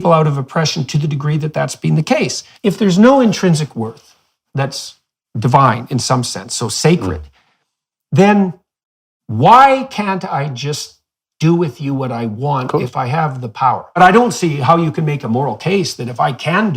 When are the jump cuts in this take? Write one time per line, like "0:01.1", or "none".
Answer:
0:02.4
0:14.0